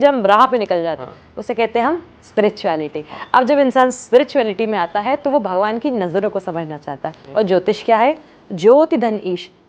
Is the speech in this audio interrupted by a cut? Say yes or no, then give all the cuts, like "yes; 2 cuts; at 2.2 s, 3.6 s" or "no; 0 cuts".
no; 0 cuts